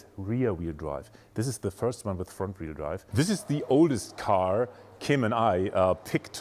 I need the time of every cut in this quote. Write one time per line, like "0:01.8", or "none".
0:03.0

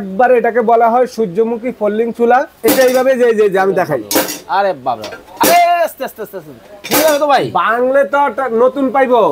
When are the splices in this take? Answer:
0:02.5

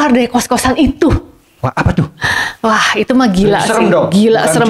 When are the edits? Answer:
0:01.5

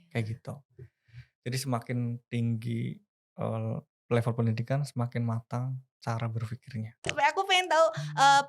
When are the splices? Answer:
0:07.1

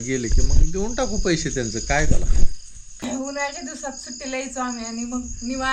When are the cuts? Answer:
0:03.0

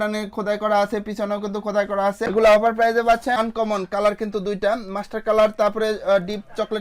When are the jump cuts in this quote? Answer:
0:03.4

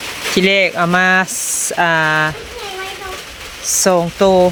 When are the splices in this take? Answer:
none

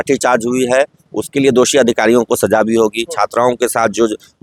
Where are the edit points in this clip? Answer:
none

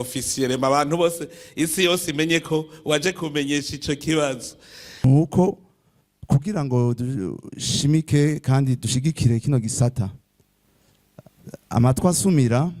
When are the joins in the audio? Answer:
0:05.0

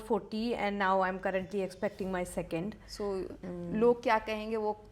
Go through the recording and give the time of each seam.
0:03.4

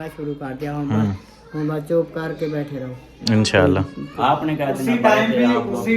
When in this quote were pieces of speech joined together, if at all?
0:04.0

